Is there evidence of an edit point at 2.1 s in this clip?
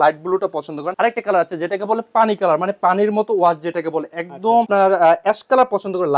no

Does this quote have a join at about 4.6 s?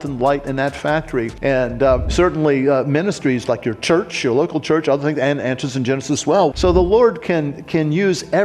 no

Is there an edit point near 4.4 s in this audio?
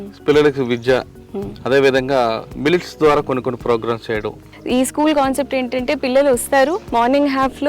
yes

